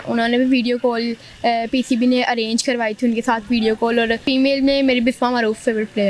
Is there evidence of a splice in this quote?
yes; 1 cut; at 4.2 s

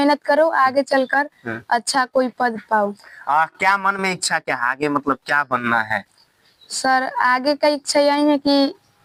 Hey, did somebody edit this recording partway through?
no; 0 cuts

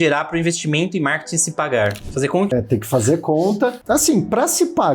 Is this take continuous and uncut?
no; 2 cuts; at 2.5 s, 3.8 s

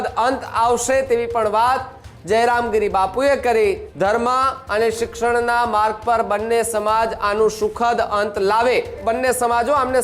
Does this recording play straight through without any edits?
no; 2 cuts; at 3.9 s, 9.0 s

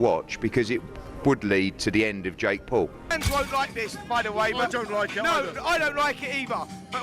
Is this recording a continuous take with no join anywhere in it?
no; 1 cut; at 3.1 s

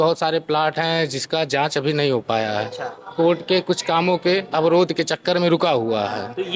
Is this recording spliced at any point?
no; 0 cuts

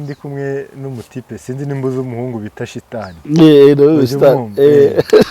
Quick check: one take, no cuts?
yes; 0 cuts

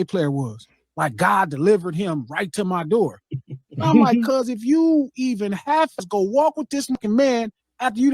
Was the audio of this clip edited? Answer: yes; 2 cuts; at 6.0 s, 7.0 s

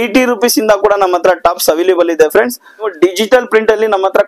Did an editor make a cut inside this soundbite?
yes; 1 cut; at 2.9 s

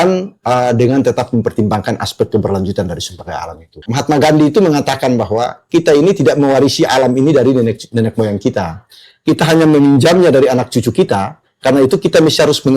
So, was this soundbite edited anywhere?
yes; 1 cut; at 3.8 s

